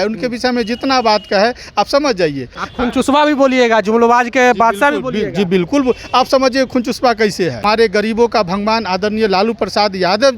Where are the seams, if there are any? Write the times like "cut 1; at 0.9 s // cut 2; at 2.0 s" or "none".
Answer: cut 1; at 2.6 s // cut 2; at 7.6 s